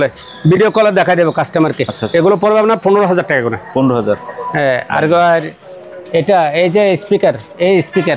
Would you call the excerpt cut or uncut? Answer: uncut